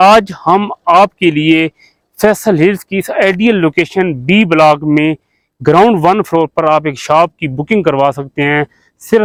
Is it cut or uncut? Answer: uncut